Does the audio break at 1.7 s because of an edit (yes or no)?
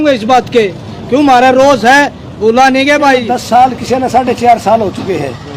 no